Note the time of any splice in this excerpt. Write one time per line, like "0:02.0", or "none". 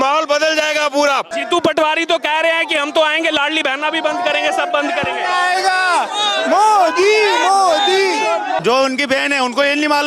0:01.3
0:08.6